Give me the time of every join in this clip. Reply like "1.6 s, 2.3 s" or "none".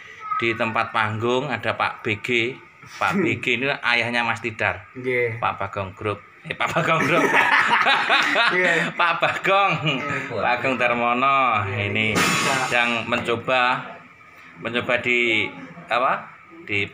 none